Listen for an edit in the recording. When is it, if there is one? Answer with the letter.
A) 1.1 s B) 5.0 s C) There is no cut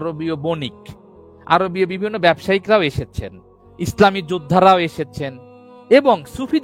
C